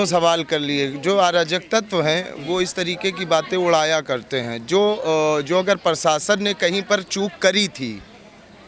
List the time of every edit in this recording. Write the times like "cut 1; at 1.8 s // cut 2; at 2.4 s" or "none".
none